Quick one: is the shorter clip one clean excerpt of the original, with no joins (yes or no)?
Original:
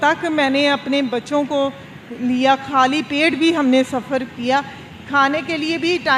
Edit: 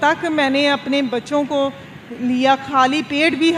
yes